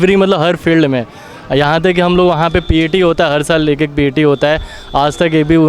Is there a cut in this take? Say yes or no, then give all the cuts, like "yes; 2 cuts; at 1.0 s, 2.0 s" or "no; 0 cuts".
no; 0 cuts